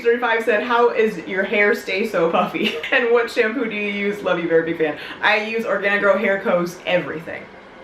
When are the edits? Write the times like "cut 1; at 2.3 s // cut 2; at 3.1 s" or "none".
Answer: none